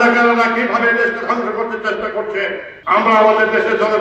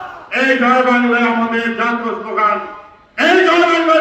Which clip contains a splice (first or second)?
first